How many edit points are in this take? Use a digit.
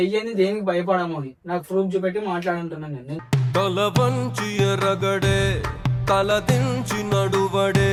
0